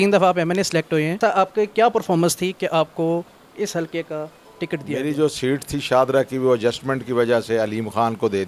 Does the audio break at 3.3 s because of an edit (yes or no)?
no